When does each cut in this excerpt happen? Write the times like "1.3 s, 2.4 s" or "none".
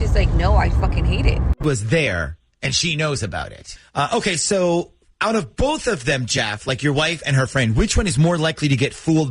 1.6 s